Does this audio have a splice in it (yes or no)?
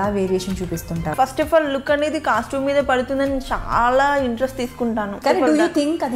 yes